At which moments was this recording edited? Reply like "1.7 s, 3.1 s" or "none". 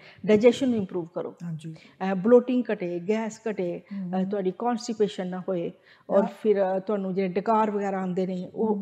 none